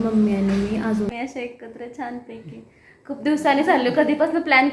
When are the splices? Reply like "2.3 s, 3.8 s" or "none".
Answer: 1.1 s